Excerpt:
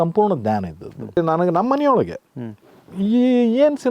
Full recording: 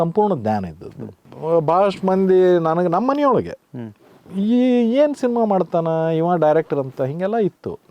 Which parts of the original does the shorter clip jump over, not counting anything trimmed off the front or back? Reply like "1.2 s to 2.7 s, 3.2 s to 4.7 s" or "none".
1.2 s to 2.5 s